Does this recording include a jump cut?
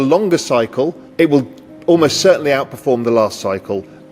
yes; 1 cut; at 1.0 s

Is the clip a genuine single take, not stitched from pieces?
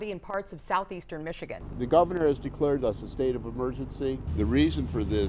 no; 2 cuts; at 1.5 s, 4.2 s

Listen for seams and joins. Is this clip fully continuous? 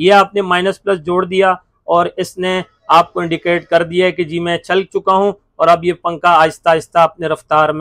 yes; 0 cuts

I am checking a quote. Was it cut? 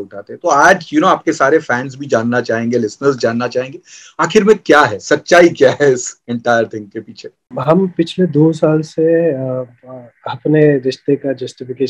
yes; 1 cut; at 7.6 s

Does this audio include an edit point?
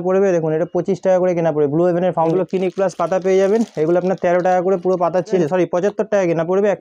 yes; 2 cuts; at 2.3 s, 5.4 s

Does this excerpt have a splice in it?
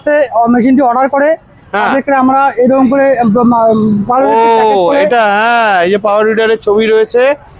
no; 0 cuts

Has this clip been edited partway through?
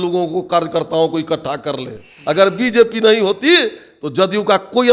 yes; 1 cut; at 2.1 s

